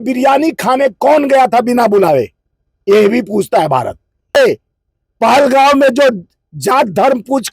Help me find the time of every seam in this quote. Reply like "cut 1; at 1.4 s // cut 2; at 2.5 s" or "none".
cut 1; at 4.4 s